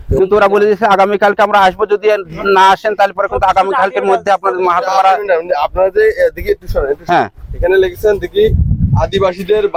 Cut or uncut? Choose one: uncut